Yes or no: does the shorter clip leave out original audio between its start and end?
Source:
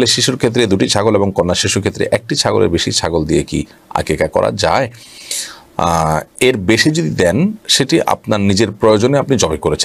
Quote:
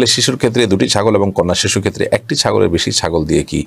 no